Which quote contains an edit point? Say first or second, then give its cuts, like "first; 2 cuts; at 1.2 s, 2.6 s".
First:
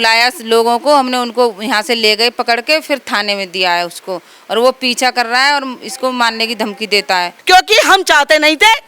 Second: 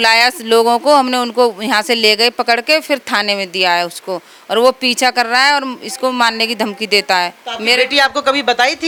first; 1 cut; at 7.3 s